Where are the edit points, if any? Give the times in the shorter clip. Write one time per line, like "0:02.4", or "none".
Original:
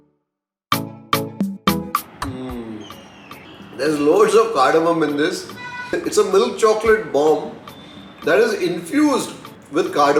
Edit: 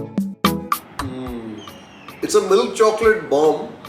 0:02.2